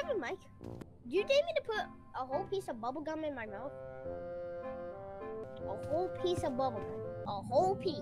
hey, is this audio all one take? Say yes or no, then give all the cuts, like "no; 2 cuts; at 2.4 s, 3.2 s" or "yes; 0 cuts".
no; 3 cuts; at 0.9 s, 5.4 s, 7.2 s